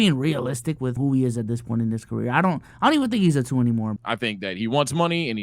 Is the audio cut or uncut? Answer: cut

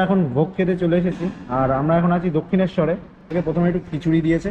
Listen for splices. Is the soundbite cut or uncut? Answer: cut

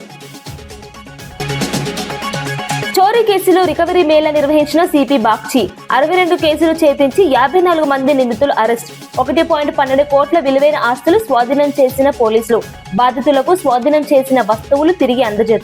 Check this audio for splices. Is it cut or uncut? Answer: cut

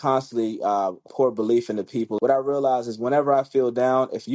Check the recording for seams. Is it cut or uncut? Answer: cut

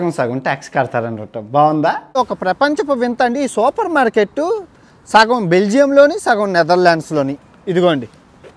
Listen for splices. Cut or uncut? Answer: cut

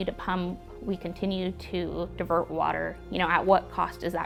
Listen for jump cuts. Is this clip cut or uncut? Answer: uncut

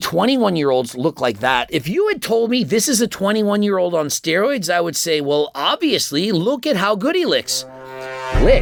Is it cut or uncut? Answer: uncut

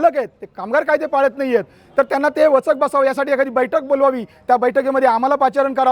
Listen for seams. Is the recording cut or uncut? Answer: uncut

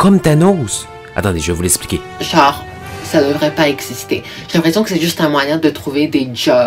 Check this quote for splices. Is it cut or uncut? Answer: cut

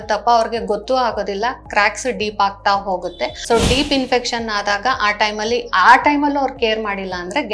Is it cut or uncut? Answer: cut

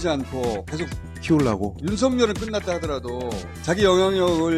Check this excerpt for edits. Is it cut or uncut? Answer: uncut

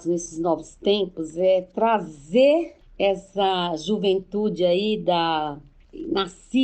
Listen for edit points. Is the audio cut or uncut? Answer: cut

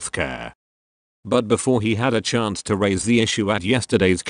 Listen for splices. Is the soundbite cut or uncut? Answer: cut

